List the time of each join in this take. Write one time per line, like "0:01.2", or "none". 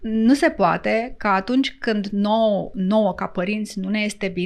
none